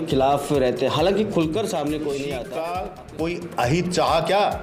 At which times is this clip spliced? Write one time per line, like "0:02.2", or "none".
0:02.4